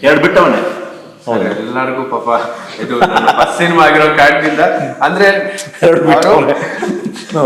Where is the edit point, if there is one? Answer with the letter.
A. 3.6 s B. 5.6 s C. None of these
C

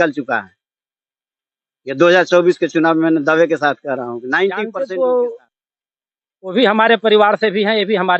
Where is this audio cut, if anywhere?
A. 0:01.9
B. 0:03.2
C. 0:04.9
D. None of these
C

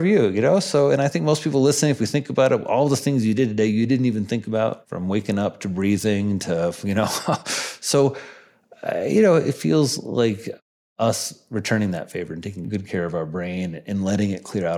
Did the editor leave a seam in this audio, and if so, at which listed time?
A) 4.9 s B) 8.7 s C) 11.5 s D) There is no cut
A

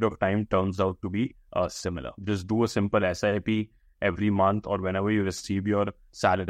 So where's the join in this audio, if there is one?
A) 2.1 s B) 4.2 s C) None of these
A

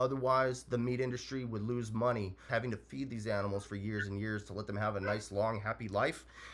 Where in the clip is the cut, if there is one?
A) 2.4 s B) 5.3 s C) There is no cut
A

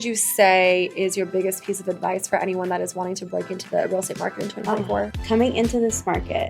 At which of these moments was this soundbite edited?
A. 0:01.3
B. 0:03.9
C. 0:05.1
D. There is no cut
C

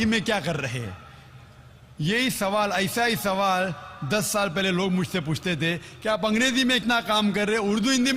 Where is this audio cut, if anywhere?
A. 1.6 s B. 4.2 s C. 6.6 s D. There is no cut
C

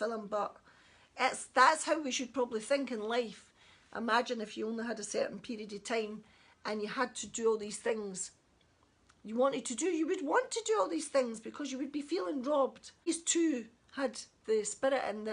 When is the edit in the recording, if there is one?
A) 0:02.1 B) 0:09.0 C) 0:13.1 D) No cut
C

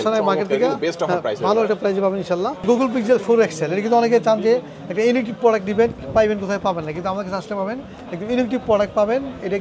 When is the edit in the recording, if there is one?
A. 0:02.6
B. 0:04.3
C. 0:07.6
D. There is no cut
A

